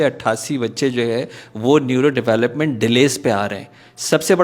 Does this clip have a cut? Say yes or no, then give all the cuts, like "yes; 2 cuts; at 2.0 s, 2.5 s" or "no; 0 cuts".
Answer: no; 0 cuts